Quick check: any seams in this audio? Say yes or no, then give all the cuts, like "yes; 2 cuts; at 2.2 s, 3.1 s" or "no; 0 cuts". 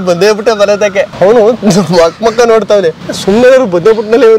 yes; 2 cuts; at 1.1 s, 3.1 s